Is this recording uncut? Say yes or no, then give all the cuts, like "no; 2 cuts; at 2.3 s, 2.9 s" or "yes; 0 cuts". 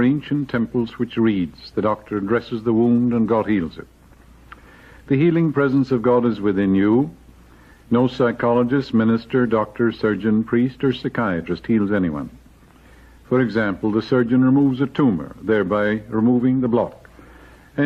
yes; 0 cuts